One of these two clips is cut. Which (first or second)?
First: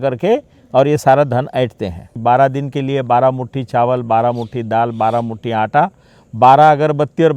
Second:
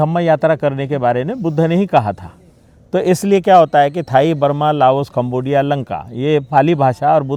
first